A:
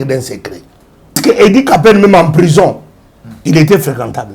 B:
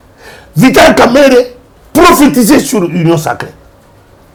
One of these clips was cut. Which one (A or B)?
A